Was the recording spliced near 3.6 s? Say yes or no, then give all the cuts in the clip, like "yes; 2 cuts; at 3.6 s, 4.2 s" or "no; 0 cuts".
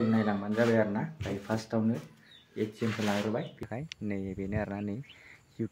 yes; 1 cut; at 3.6 s